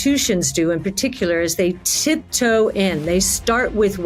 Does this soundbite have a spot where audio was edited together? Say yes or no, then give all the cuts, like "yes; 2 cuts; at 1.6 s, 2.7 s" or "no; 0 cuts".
no; 0 cuts